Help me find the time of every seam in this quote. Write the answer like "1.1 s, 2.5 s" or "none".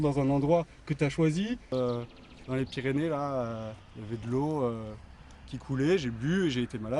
1.7 s